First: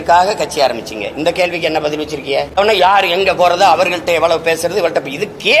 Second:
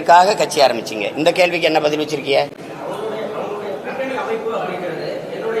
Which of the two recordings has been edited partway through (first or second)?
first